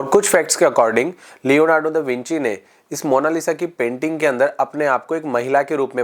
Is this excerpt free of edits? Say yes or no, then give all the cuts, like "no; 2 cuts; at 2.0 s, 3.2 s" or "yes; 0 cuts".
yes; 0 cuts